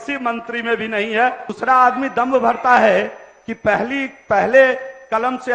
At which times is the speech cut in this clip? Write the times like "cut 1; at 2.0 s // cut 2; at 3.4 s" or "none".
cut 1; at 1.5 s